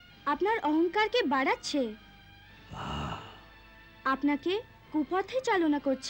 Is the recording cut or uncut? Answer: uncut